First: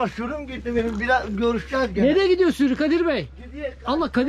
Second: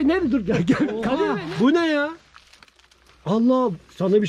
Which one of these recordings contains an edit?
second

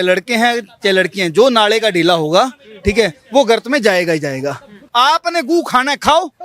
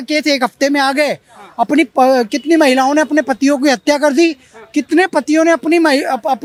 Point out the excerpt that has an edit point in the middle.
first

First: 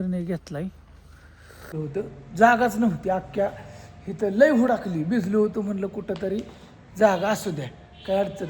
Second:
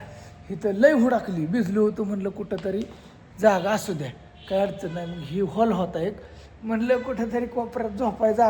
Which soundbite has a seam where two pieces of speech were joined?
first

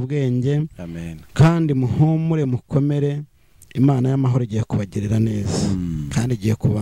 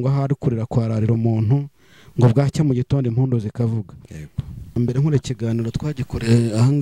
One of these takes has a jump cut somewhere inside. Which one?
second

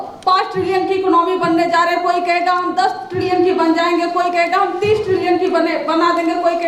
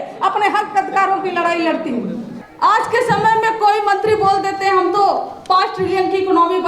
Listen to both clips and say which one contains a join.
second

